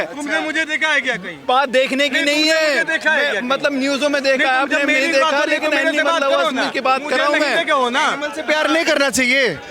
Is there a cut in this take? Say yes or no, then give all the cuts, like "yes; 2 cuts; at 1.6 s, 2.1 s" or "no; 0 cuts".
no; 0 cuts